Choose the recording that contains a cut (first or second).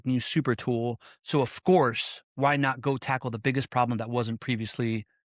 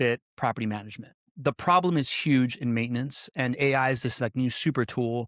second